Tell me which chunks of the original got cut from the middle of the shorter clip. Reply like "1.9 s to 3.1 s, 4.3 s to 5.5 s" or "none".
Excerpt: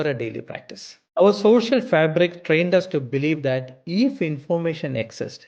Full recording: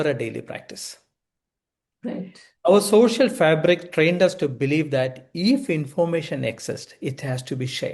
0.9 s to 2.4 s